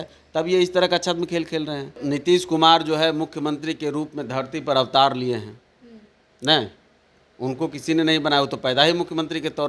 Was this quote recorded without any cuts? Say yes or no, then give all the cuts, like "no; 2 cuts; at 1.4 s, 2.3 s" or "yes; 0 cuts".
no; 1 cut; at 2.0 s